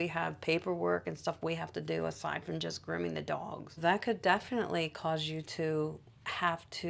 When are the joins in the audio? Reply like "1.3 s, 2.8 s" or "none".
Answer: none